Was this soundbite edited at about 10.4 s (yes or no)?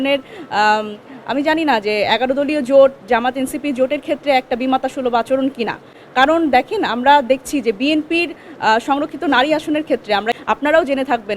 yes